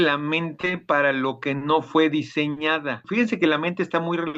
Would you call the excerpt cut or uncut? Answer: cut